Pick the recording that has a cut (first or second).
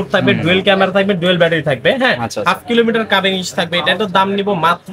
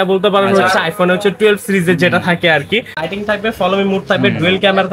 second